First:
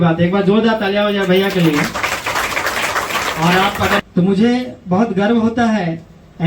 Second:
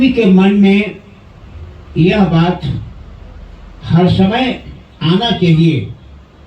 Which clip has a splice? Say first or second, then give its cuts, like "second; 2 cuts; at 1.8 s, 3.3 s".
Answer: first; 1 cut; at 4.0 s